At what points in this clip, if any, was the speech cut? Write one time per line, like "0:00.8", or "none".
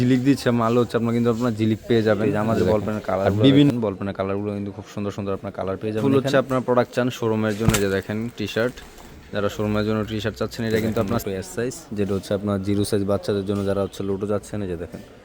0:03.7
0:06.3
0:11.2